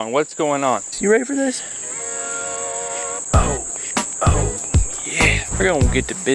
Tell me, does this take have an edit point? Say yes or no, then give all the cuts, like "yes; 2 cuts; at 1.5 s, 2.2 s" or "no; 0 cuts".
yes; 1 cut; at 0.9 s